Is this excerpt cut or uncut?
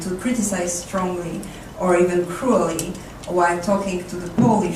uncut